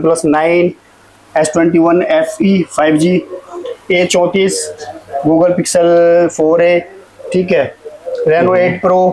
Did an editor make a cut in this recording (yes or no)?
no